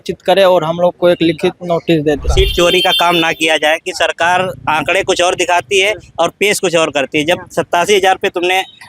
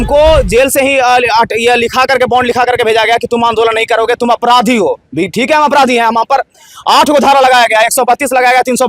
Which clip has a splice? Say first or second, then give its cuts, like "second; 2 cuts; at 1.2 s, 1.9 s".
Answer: first; 1 cut; at 2.3 s